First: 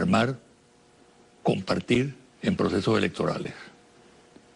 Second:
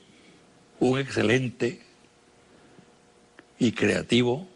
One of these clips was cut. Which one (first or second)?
first